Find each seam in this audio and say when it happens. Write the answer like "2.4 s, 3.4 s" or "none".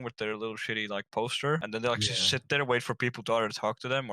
1.7 s